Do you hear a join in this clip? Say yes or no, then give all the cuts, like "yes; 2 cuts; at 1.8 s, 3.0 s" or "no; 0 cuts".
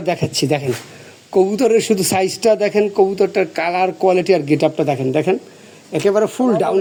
no; 0 cuts